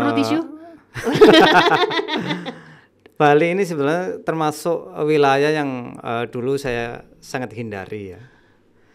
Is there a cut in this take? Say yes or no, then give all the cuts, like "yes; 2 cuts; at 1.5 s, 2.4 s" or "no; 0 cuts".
no; 0 cuts